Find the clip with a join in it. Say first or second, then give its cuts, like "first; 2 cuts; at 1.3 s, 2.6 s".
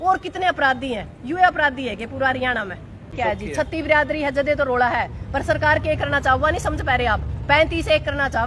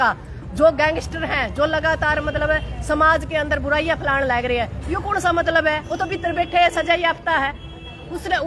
first; 1 cut; at 3.1 s